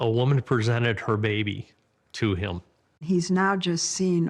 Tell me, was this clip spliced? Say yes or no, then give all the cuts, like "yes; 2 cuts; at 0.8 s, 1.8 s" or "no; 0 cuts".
yes; 1 cut; at 3.0 s